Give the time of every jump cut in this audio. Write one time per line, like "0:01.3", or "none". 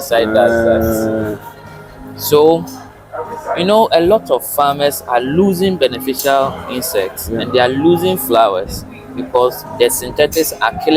none